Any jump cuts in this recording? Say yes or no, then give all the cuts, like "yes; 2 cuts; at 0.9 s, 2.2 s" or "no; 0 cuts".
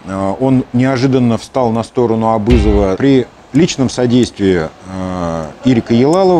yes; 1 cut; at 3.0 s